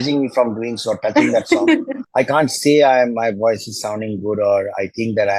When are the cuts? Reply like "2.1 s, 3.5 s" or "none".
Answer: 2.0 s